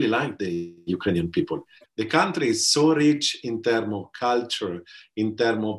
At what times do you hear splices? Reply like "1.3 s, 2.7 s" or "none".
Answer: 1.8 s

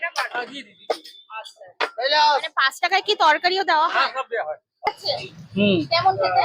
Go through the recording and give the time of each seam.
4.9 s

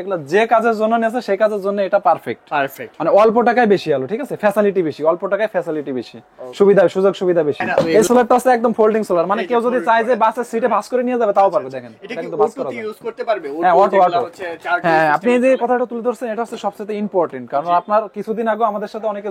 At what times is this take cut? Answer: 7.9 s

